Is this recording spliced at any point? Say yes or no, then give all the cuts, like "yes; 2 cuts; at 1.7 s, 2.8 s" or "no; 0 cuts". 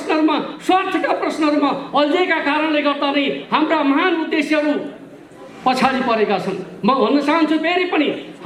no; 0 cuts